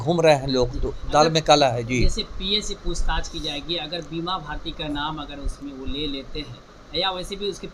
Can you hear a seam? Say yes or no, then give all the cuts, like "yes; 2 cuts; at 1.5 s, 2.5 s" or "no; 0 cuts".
no; 0 cuts